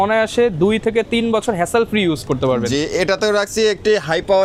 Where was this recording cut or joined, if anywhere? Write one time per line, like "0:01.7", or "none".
none